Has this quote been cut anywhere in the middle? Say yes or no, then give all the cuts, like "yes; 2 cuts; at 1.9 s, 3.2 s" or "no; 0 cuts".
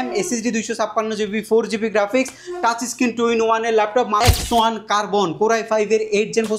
yes; 1 cut; at 4.2 s